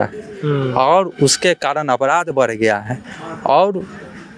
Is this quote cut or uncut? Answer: uncut